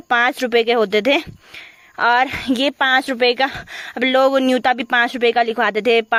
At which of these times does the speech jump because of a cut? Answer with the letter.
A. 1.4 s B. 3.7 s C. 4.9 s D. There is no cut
D